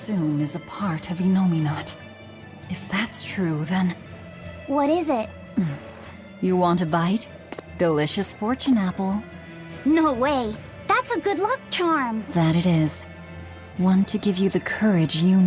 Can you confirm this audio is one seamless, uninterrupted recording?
no; 1 cut; at 1.1 s

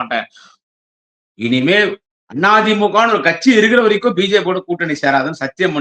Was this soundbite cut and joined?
no; 0 cuts

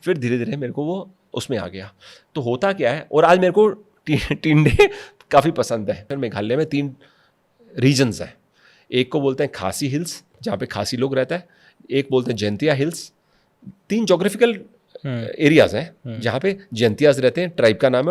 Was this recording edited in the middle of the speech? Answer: yes; 1 cut; at 6.1 s

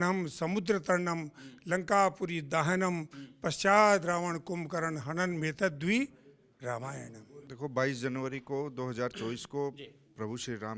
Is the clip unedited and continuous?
no; 1 cut; at 7.4 s

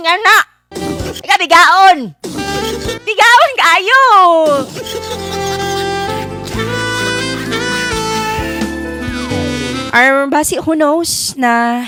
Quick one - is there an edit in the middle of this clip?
no; 0 cuts

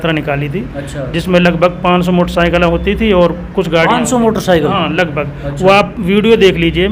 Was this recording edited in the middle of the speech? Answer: no; 0 cuts

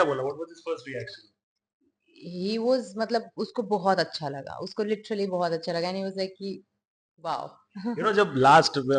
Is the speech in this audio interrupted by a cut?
no; 0 cuts

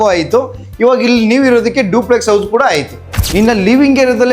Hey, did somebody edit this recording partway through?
yes; 1 cut; at 3.2 s

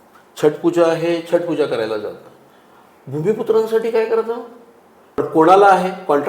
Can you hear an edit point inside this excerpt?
yes; 1 cut; at 5.2 s

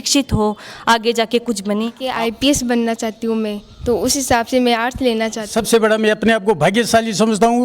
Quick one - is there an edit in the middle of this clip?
yes; 2 cuts; at 2.0 s, 5.5 s

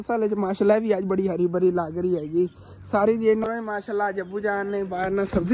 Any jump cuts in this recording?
yes; 1 cut; at 3.4 s

